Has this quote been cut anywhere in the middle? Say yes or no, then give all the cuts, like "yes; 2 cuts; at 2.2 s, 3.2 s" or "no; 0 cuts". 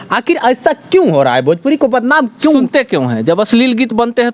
no; 0 cuts